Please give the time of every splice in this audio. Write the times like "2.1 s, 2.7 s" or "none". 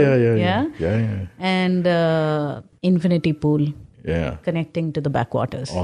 2.6 s